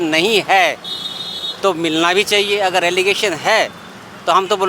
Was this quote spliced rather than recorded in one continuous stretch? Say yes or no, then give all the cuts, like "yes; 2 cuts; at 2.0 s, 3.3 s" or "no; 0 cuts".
no; 0 cuts